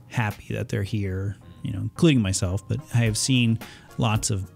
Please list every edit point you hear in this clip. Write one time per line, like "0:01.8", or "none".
0:02.9